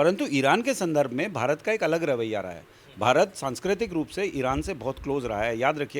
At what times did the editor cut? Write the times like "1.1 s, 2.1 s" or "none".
none